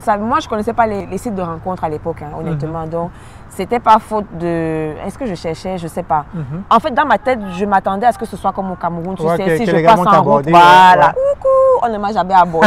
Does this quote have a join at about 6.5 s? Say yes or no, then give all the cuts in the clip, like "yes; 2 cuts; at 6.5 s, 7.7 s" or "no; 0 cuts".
yes; 2 cuts; at 1.0 s, 6.5 s